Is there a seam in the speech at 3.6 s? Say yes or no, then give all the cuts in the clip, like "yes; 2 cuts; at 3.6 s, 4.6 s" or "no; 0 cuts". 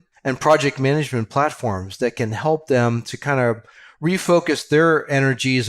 no; 0 cuts